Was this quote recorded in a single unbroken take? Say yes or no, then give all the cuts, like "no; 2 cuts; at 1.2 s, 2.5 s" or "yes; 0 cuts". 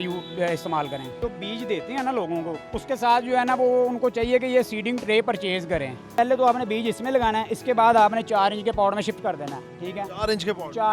no; 3 cuts; at 1.1 s, 2.7 s, 6.1 s